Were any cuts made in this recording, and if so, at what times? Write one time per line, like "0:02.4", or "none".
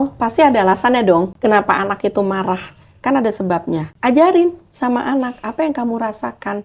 0:01.3
0:03.9

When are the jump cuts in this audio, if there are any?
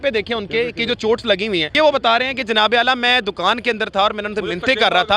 0:01.7

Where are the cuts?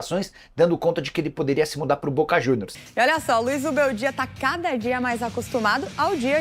0:02.7

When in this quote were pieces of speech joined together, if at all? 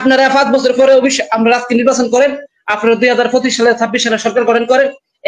none

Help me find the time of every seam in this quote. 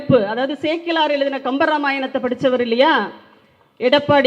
none

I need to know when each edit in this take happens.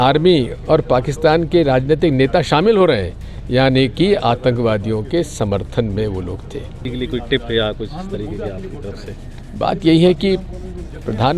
0:06.9

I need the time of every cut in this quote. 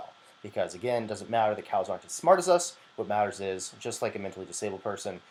none

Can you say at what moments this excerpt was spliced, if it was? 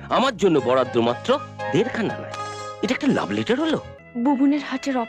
0:04.0

